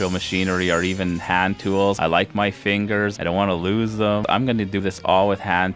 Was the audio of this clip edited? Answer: yes; 3 cuts; at 2.0 s, 3.1 s, 4.4 s

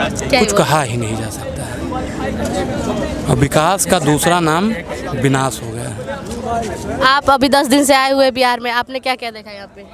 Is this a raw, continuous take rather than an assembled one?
yes; 0 cuts

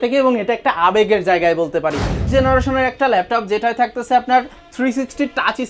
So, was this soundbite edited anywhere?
yes; 1 cut; at 2.2 s

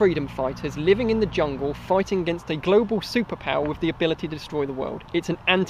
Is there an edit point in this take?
no; 0 cuts

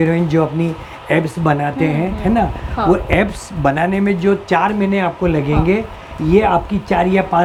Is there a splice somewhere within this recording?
no; 0 cuts

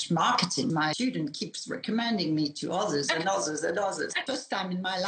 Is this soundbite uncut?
no; 2 cuts; at 0.8 s, 4.2 s

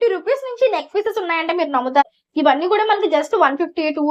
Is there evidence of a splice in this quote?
yes; 1 cut; at 2.0 s

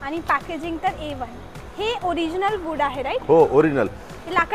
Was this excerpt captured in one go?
yes; 0 cuts

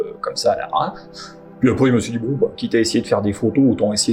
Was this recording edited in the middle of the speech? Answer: no; 0 cuts

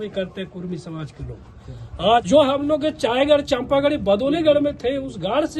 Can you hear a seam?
yes; 1 cut; at 2.2 s

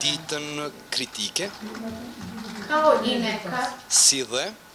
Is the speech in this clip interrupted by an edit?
no; 0 cuts

